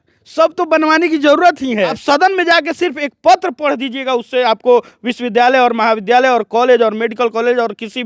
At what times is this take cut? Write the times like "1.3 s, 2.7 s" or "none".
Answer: 2.0 s